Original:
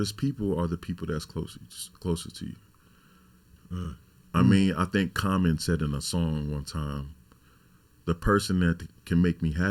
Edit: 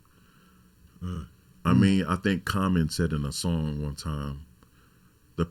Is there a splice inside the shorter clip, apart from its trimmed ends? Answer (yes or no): no